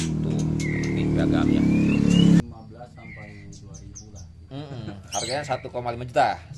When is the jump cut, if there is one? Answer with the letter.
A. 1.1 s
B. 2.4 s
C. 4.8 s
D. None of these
B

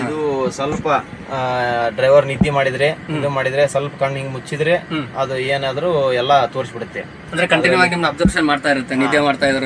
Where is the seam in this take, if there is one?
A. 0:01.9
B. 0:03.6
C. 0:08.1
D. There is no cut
D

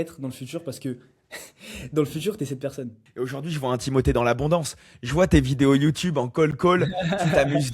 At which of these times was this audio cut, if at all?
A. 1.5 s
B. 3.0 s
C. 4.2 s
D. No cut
B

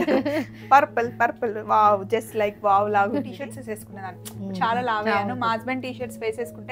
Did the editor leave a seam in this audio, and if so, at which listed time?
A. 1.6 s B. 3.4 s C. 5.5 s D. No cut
B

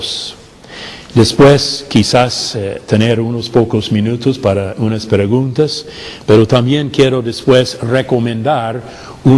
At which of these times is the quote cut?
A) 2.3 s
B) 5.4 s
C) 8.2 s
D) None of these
C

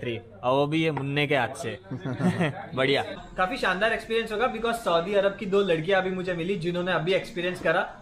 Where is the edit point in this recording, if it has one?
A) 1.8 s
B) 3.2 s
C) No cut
B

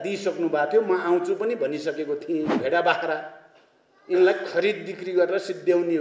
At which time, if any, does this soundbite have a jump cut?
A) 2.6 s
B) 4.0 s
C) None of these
A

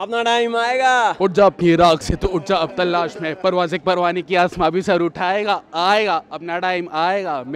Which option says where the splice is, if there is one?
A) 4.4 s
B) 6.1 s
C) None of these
C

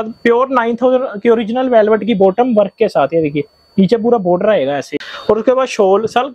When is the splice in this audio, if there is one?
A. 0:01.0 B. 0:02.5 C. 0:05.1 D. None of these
D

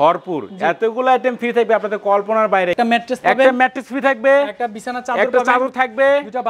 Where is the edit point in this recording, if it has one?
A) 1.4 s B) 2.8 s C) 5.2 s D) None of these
B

